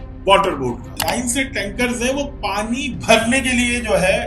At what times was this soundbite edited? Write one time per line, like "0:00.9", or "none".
0:00.9